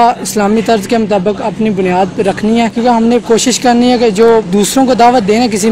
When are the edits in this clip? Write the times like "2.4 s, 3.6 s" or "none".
2.7 s